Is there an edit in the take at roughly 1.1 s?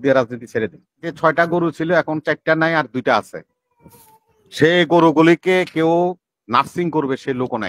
yes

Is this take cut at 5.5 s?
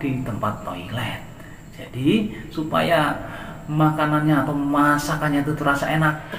no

